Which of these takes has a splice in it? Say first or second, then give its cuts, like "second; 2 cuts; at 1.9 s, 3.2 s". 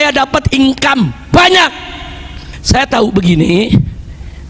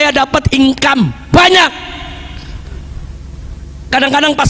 first; 1 cut; at 2.5 s